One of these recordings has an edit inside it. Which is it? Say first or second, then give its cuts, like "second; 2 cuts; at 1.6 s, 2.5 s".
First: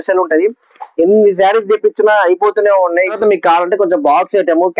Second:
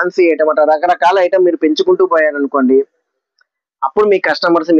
first; 1 cut; at 3.1 s